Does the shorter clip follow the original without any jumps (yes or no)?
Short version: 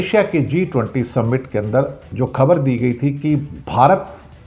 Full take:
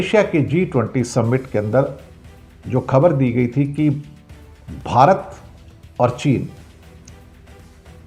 no